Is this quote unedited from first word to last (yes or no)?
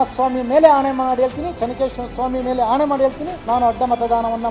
yes